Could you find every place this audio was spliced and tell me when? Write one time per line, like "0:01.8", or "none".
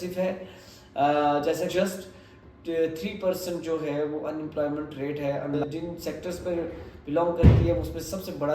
0:01.7
0:05.6